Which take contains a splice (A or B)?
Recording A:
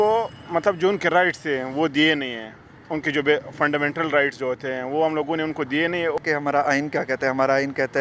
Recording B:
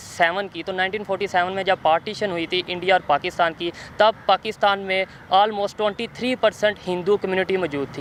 A